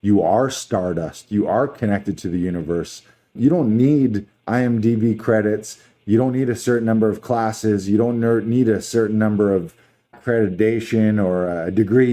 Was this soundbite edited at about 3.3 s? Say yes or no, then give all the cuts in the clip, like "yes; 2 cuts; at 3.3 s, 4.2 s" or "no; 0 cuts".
yes; 2 cuts; at 3.3 s, 10.2 s